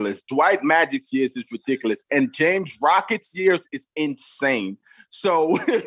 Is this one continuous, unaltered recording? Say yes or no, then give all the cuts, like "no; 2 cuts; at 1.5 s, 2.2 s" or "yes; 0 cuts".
yes; 0 cuts